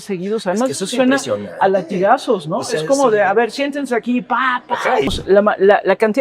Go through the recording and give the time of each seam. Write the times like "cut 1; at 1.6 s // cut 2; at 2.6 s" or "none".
cut 1; at 5.1 s